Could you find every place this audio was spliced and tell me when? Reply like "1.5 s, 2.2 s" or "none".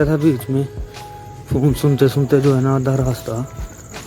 none

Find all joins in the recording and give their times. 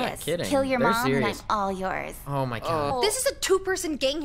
2.9 s

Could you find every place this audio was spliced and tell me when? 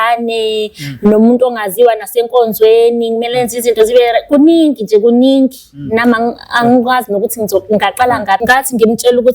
8.4 s

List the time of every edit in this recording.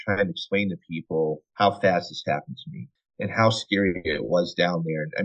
1.5 s, 2.9 s

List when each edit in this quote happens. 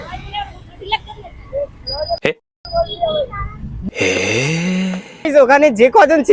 5.3 s

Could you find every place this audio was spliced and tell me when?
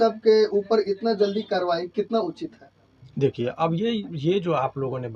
none

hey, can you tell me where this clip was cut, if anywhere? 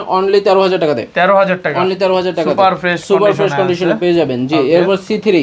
none

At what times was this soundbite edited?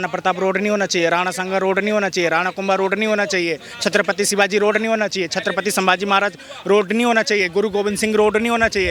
none

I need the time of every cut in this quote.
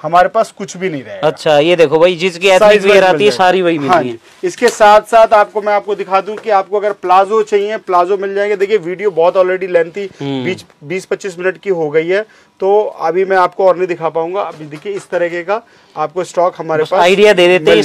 none

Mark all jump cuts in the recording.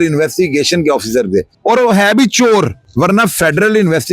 1.5 s, 2.8 s

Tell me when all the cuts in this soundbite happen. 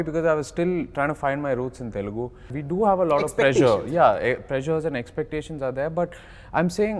2.5 s

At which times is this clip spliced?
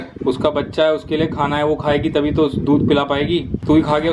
none

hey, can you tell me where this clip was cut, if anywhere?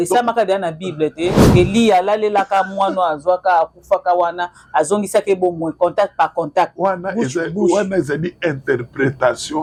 none

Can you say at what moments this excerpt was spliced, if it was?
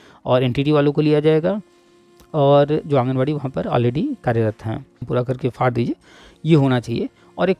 4.9 s

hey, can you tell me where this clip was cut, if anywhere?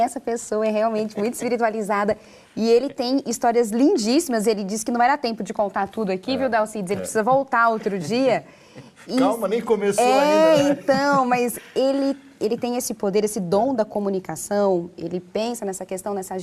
none

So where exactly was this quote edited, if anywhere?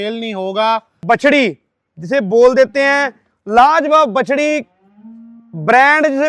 1.0 s

